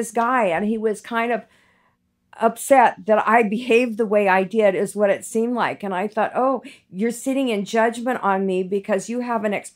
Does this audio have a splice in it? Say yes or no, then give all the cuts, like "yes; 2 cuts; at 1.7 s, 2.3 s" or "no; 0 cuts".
no; 0 cuts